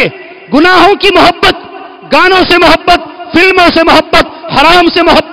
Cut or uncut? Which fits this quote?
uncut